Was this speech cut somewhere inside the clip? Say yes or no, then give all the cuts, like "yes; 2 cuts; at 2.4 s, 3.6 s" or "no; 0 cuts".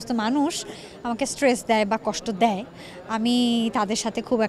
no; 0 cuts